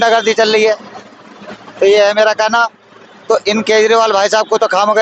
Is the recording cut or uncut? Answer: uncut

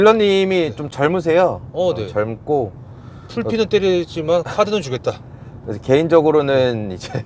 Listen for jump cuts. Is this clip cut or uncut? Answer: uncut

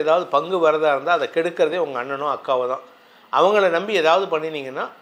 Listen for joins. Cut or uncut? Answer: uncut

